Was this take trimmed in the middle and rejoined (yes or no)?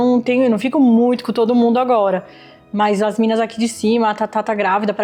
no